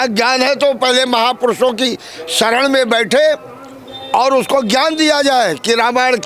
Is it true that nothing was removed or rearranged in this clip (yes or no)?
yes